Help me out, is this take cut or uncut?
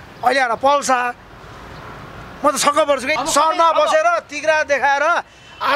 cut